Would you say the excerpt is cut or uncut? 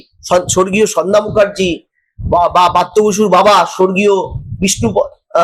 uncut